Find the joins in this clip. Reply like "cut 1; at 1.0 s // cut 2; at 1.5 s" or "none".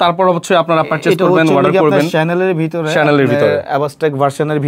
none